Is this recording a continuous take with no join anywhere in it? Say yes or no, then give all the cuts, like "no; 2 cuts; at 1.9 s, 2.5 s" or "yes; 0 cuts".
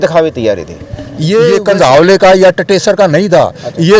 no; 1 cut; at 1.5 s